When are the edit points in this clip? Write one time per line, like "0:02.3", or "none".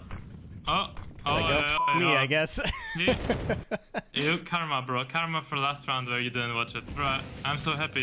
0:06.9